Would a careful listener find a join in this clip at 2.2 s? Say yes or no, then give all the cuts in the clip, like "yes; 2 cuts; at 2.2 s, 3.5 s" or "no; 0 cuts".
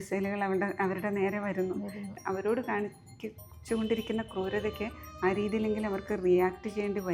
yes; 1 cut; at 2.2 s